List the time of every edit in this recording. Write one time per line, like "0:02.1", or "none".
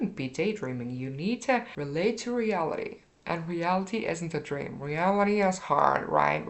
0:01.7

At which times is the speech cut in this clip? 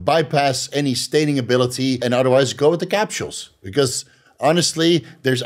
0:02.0

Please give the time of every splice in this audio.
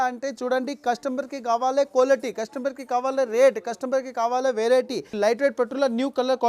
0:05.1

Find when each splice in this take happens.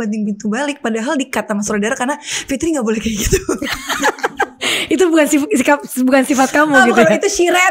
none

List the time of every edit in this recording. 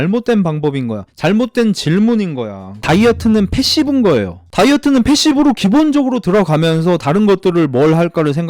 0:02.7
0:04.4

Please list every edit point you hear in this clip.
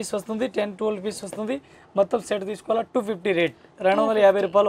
none

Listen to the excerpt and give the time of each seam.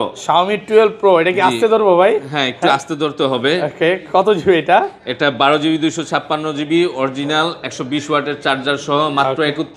none

